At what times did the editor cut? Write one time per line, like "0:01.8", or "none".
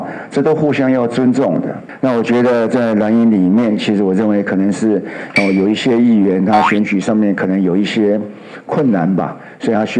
0:01.8